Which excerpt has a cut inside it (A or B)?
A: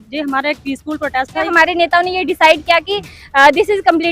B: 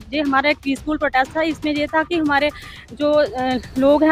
A